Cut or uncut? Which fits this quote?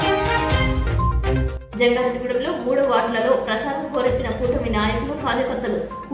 cut